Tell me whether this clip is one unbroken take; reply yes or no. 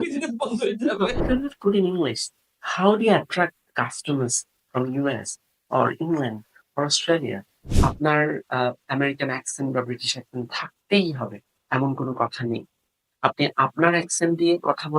no